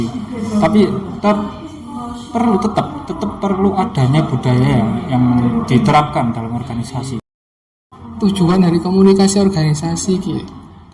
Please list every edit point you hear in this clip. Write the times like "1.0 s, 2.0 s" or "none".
7.5 s